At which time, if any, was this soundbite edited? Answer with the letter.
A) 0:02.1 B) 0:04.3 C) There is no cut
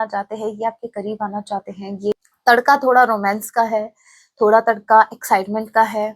A